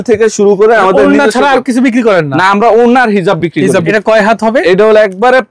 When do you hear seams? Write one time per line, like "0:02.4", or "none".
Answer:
0:03.9